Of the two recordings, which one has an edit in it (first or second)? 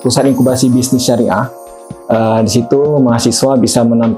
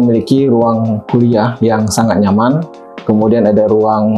second